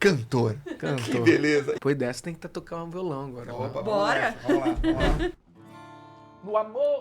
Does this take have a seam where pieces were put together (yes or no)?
yes